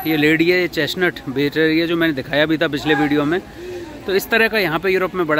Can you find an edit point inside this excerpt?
no; 0 cuts

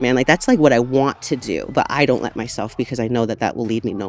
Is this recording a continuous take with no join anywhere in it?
no; 1 cut; at 1.7 s

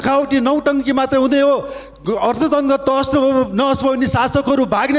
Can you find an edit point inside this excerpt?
no; 0 cuts

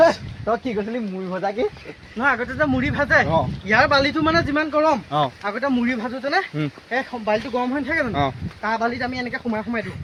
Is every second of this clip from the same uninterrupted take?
yes; 0 cuts

